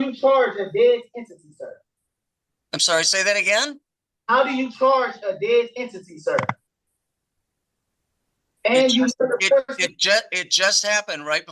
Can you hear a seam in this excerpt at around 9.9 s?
no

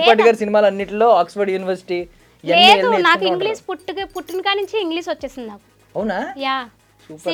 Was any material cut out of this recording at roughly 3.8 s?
no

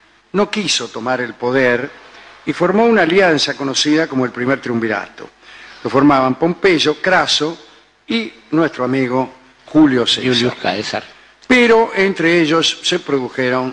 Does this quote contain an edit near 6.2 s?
yes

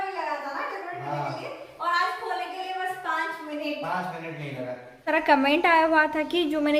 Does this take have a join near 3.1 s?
no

